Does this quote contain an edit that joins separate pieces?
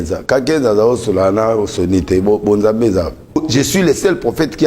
yes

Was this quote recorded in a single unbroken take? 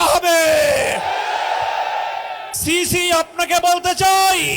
no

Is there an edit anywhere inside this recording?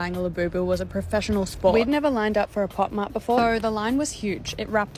yes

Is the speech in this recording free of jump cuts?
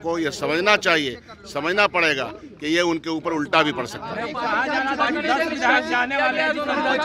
yes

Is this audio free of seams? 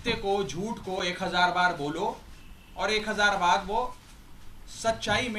yes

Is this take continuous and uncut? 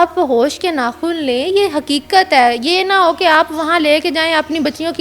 yes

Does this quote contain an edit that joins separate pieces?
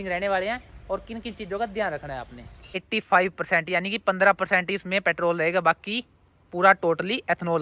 yes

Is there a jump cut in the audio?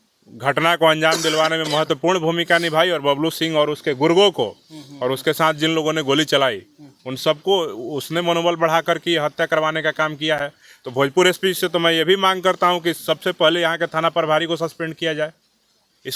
no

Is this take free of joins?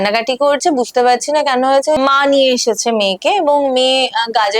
no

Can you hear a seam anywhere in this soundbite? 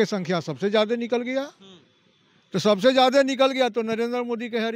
no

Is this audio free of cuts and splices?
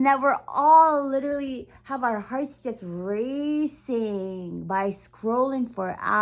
yes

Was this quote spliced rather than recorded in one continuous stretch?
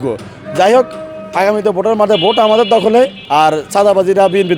yes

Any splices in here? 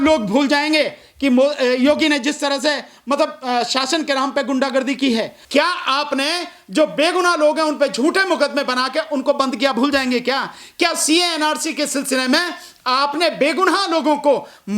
no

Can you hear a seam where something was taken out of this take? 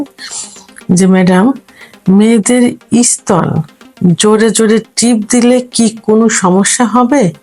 no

